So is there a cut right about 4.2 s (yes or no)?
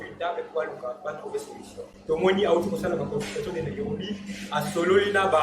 no